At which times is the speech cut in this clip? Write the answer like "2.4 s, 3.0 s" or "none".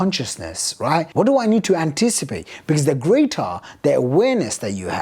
1.1 s